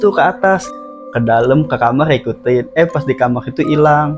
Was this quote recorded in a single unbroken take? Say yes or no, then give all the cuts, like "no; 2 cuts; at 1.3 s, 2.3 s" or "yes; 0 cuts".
yes; 0 cuts